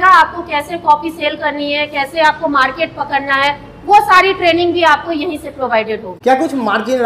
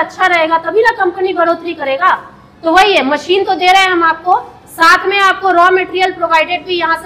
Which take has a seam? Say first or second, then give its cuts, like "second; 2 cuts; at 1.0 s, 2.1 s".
first; 1 cut; at 6.1 s